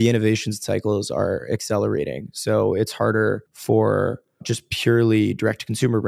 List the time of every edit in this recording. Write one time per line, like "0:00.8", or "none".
0:03.5
0:04.6